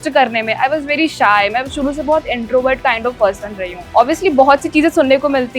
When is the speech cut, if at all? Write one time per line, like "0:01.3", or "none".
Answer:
0:03.8